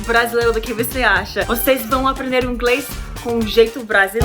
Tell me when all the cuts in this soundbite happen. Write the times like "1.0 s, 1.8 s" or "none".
1.5 s